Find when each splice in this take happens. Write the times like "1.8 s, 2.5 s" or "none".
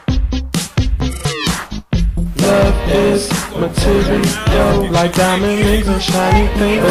4.6 s